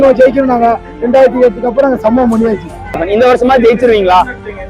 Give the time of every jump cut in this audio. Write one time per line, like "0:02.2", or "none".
0:03.0

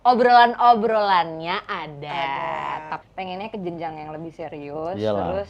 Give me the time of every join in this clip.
0:03.0

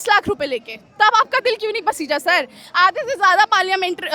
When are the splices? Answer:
none

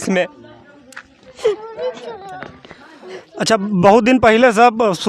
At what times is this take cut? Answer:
none

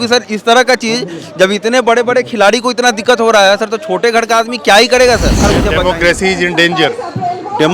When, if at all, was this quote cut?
0:05.5

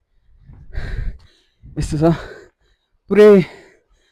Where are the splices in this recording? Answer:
none

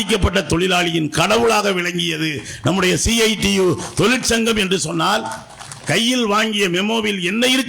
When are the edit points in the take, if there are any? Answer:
none

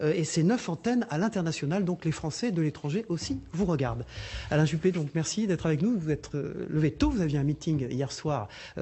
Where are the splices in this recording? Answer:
0:01.4

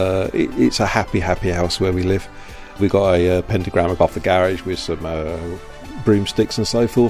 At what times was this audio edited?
0:02.8
0:03.9

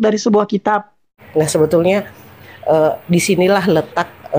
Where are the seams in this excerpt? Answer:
0:01.2

